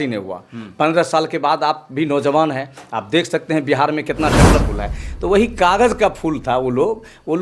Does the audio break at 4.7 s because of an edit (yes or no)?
yes